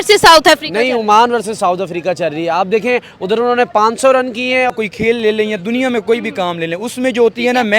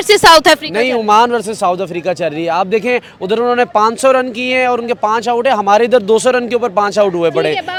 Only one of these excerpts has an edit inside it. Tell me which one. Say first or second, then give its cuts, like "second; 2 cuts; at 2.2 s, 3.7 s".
first; 1 cut; at 4.7 s